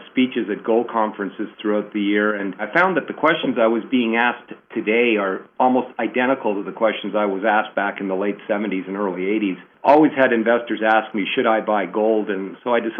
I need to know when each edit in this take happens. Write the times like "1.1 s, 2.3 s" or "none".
2.6 s, 9.7 s